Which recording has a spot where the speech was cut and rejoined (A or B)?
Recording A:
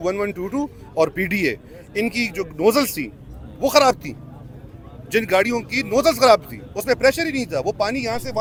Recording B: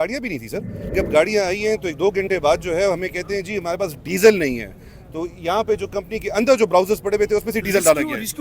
B